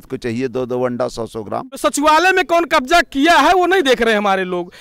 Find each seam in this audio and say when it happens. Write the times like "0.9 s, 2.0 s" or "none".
1.7 s